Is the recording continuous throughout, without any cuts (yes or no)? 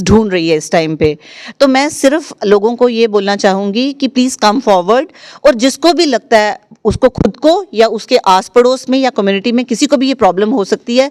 yes